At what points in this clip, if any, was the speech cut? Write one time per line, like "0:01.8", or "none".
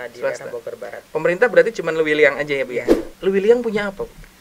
0:03.0